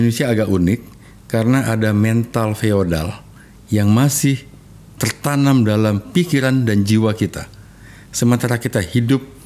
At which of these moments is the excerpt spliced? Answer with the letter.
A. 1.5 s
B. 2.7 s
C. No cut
C